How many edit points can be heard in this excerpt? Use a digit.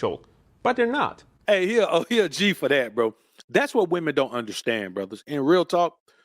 1